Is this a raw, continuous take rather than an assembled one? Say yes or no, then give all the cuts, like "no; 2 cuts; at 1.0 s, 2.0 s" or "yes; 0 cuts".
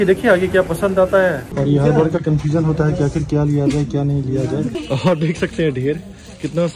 no; 2 cuts; at 1.4 s, 4.8 s